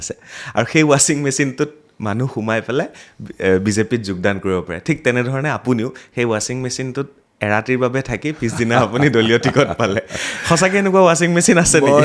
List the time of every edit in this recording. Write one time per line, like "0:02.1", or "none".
none